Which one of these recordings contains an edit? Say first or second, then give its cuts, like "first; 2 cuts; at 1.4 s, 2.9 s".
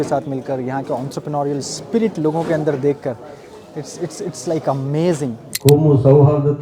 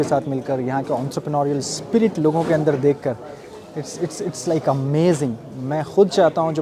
first; 1 cut; at 5.4 s